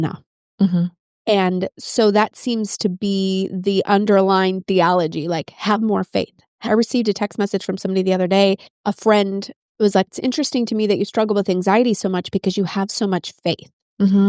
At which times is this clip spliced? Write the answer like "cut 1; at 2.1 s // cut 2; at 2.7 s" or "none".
cut 1; at 8.7 s // cut 2; at 10.1 s